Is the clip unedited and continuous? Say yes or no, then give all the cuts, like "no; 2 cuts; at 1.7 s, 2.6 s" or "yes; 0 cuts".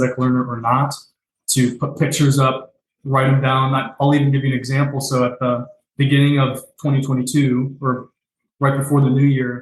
yes; 0 cuts